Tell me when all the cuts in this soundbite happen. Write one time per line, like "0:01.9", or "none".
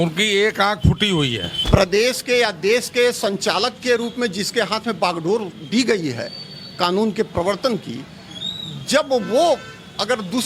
0:01.5